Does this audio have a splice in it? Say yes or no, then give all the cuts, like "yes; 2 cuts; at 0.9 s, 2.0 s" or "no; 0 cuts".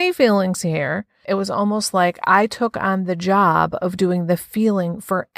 yes; 1 cut; at 1.2 s